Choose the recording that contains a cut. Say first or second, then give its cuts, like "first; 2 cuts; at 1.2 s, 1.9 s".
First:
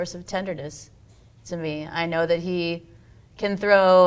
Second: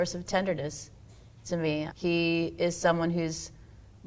second; 1 cut; at 1.9 s